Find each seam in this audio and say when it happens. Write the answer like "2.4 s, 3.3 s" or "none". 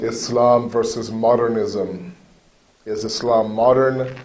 1.9 s